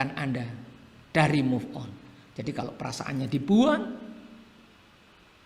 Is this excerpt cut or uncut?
uncut